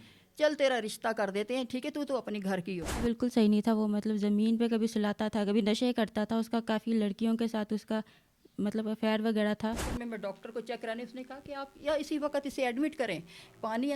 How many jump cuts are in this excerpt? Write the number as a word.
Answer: two